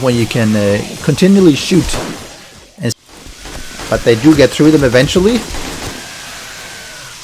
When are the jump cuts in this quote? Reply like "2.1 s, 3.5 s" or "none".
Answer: 2.9 s